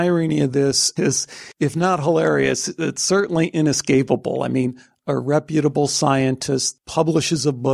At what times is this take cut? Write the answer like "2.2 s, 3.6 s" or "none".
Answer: 0.9 s, 6.7 s